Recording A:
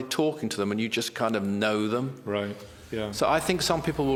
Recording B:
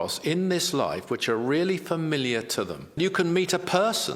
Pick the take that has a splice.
B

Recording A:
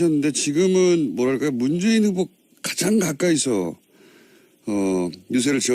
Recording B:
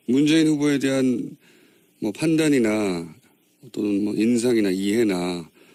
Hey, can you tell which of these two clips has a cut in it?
A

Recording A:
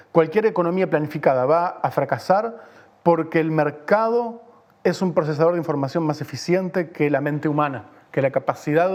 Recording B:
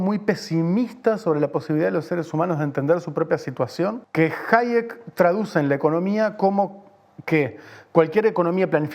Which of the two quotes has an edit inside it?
B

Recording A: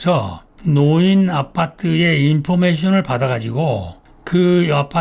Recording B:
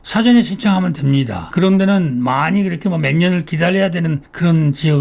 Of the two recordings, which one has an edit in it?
B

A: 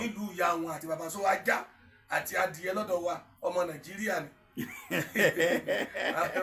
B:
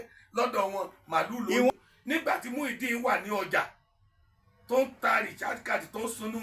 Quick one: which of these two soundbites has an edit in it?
B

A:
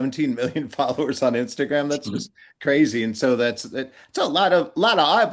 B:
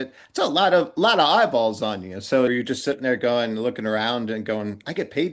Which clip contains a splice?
B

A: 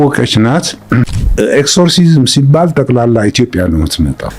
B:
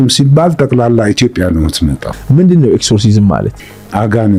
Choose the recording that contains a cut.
A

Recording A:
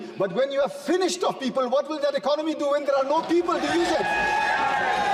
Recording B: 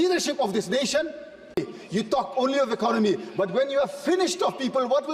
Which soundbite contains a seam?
B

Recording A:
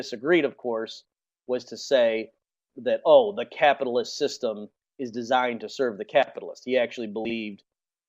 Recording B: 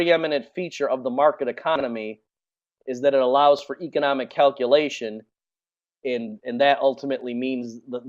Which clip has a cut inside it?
B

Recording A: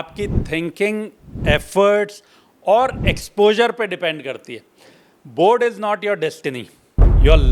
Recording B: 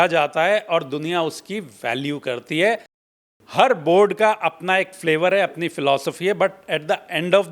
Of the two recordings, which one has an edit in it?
B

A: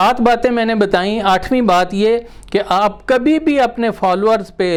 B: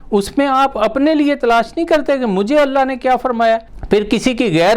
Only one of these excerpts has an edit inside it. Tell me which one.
B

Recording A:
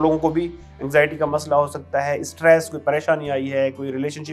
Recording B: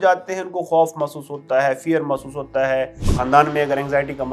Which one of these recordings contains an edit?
B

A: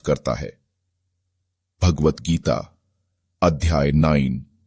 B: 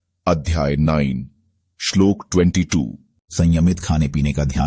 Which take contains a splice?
B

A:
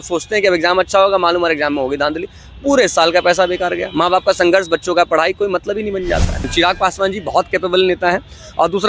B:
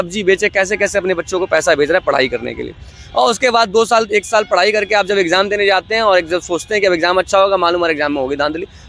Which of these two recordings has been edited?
A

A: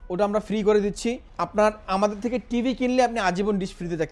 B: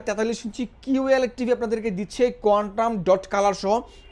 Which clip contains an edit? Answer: A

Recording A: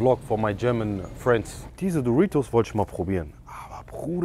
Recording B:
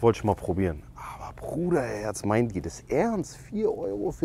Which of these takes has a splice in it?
A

